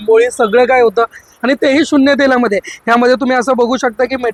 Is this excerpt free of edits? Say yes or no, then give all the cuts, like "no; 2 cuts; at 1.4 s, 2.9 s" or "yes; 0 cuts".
yes; 0 cuts